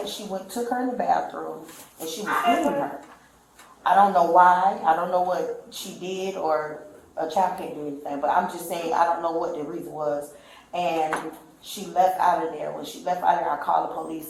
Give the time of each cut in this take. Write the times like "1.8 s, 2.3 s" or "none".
none